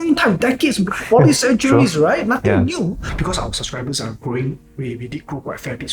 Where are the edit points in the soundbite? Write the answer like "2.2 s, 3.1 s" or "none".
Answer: 3.1 s